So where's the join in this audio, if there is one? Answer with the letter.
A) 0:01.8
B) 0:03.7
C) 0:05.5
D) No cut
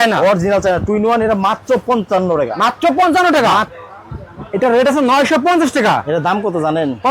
B